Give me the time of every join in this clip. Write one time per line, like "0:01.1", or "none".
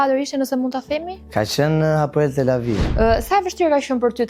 0:01.2
0:02.9